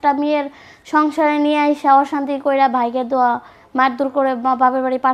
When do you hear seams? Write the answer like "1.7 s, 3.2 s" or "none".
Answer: none